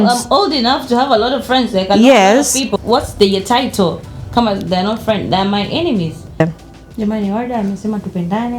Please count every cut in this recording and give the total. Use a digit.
2